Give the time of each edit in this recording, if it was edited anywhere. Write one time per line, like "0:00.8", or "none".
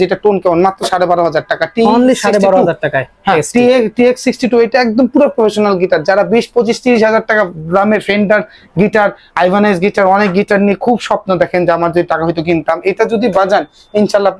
none